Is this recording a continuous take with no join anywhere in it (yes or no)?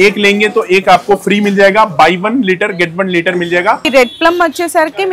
no